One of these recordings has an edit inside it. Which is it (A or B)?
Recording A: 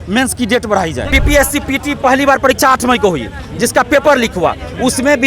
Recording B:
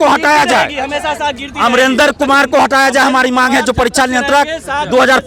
A